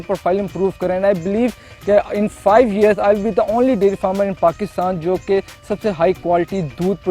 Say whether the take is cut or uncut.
uncut